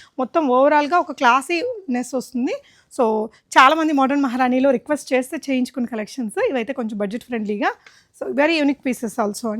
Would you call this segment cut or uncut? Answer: uncut